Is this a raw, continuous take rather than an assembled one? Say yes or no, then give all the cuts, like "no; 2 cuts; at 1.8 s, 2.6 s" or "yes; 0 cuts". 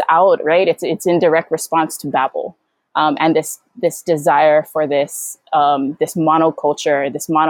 yes; 0 cuts